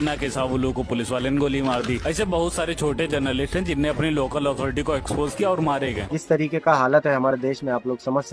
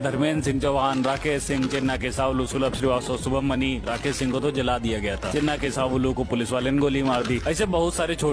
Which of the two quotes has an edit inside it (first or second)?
first